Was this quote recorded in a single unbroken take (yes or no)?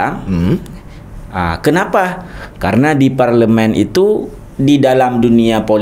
yes